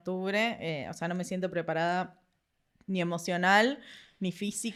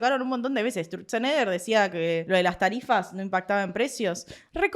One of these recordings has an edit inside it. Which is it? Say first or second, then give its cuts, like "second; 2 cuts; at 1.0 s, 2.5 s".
second; 1 cut; at 2.2 s